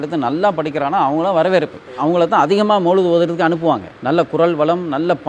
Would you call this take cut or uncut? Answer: uncut